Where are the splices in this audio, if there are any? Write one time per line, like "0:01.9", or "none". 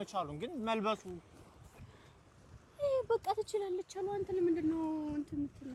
none